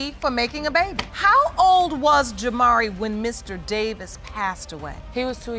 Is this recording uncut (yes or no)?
yes